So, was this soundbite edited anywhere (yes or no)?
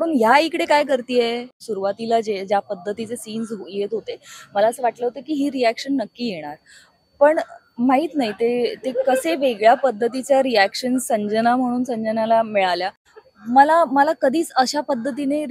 yes